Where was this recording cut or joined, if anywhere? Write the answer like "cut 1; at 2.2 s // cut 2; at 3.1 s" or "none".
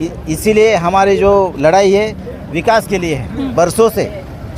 cut 1; at 3.5 s